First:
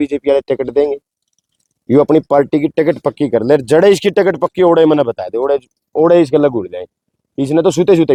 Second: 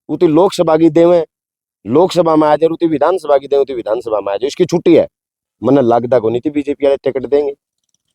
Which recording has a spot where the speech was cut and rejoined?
second; 1 cut; at 5.5 s

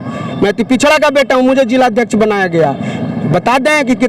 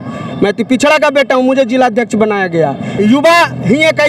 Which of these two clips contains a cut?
second; 1 cut; at 2.9 s

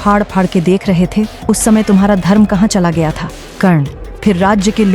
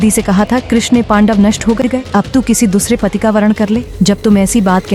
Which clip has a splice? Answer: second; 1 cut; at 1.9 s

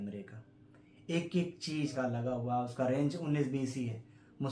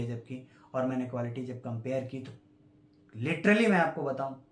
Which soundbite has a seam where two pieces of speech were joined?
first; 1 cut; at 1.9 s

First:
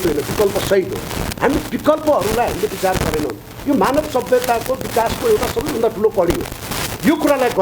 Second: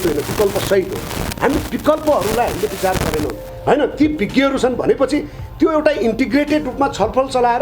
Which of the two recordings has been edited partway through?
second; 1 cut; at 3.5 s

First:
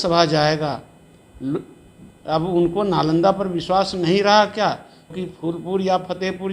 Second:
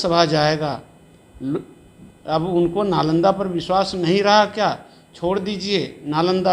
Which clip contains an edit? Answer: first; 1 cut; at 5.1 s

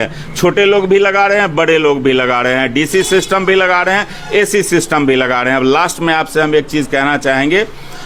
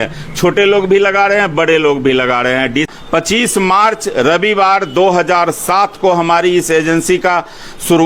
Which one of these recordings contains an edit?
second; 1 cut; at 2.9 s

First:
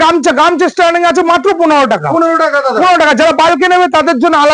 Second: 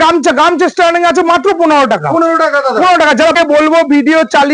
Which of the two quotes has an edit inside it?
second; 1 cut; at 3.3 s

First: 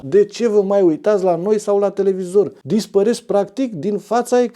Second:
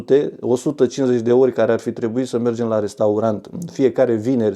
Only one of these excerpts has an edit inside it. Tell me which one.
first; 1 cut; at 2.6 s

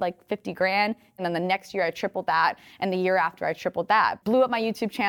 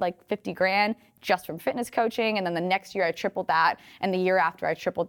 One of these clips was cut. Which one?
first; 2 cuts; at 1.2 s, 4.2 s

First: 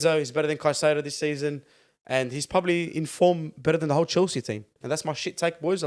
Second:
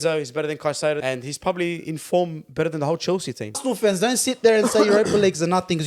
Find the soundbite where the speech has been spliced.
second; 2 cuts; at 1.0 s, 3.6 s

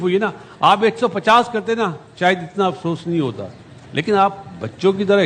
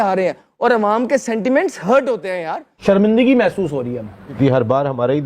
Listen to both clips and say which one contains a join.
second; 2 cuts; at 2.8 s, 4.4 s

